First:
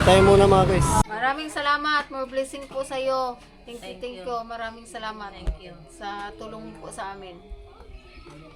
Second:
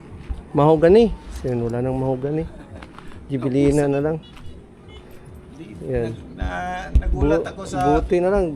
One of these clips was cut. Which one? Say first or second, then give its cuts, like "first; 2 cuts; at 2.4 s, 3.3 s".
first; 1 cut; at 1.1 s